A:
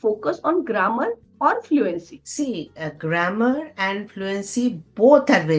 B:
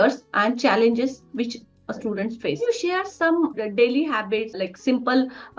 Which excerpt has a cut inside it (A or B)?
B